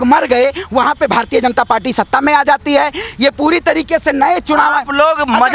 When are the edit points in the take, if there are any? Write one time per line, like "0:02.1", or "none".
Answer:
none